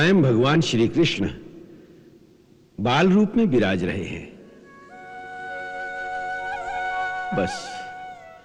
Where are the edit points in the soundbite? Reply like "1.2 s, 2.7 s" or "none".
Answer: none